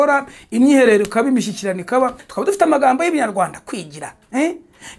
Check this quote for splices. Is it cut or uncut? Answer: cut